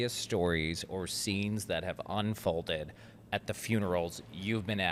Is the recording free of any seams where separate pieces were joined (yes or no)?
yes